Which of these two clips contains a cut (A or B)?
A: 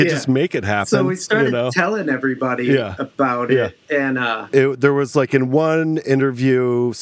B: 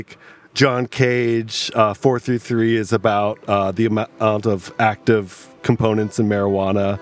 A